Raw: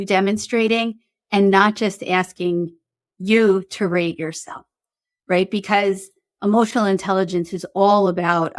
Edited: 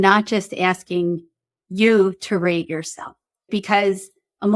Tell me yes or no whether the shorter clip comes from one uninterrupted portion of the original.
no